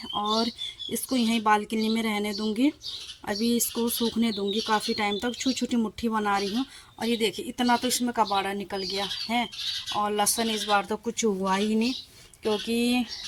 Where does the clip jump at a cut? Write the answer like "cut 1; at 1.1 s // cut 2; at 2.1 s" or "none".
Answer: none